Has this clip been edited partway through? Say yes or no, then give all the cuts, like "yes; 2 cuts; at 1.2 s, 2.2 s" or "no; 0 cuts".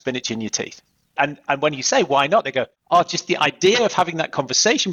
yes; 2 cuts; at 1.1 s, 2.8 s